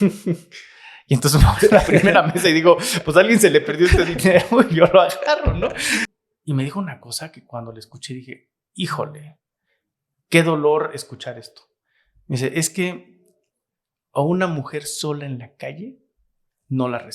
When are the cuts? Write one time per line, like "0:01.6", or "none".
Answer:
0:06.1

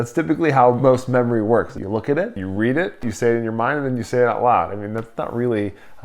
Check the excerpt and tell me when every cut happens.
0:00.8
0:01.8
0:03.0

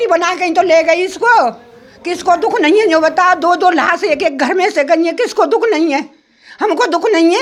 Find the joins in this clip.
none

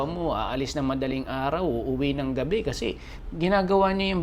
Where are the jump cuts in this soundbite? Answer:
0:03.1

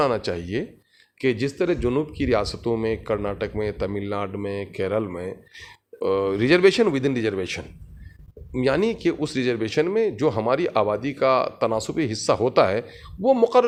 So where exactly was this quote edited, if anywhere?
none

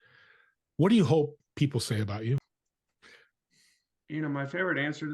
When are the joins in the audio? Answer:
0:02.4

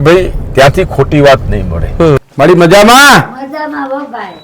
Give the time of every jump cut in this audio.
0:02.2

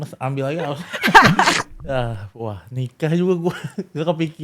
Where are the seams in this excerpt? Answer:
0:01.5

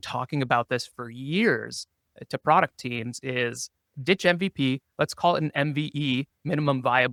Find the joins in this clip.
none

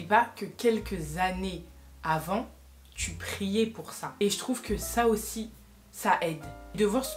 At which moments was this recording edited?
none

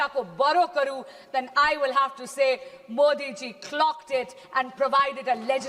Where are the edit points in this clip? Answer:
none

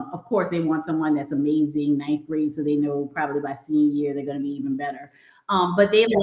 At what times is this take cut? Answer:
none

